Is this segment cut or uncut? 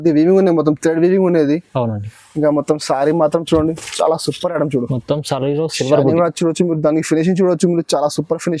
uncut